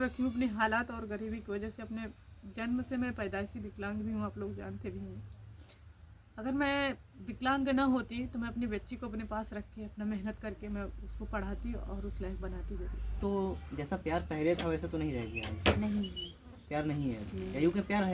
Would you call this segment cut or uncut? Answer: cut